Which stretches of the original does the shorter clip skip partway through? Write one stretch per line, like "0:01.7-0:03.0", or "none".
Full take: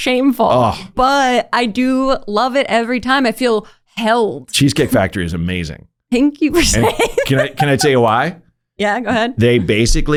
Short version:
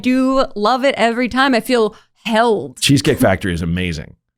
none